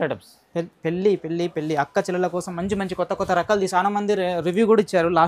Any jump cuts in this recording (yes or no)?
yes